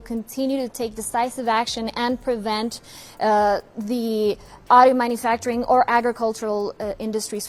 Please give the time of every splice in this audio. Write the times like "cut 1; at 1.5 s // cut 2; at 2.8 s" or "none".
none